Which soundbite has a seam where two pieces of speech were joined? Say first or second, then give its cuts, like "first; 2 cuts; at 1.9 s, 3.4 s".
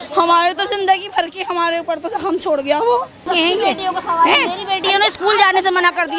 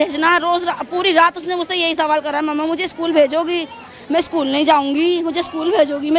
first; 1 cut; at 3.2 s